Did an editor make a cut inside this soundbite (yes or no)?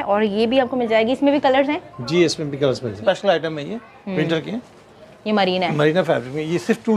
yes